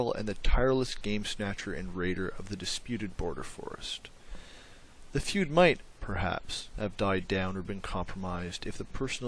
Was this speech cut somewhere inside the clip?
yes; 1 cut; at 2.4 s

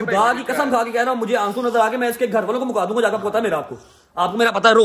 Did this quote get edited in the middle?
no; 0 cuts

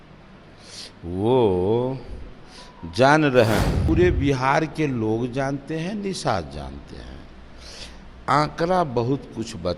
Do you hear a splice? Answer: yes; 1 cut; at 3.9 s

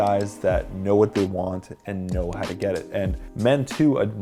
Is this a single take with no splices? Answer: yes; 0 cuts

